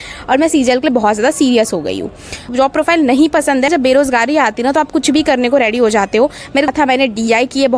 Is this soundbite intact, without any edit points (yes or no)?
no